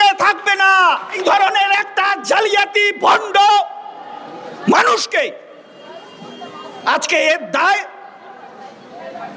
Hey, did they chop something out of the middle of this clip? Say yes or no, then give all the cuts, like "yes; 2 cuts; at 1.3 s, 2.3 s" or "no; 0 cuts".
yes; 1 cut; at 1.2 s